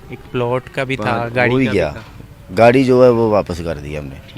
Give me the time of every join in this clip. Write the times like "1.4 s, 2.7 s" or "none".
none